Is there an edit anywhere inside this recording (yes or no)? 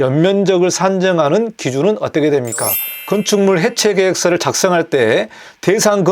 yes